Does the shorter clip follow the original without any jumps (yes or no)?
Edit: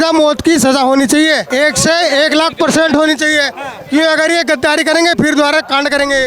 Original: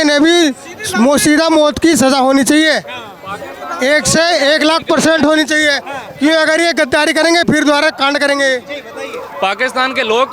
no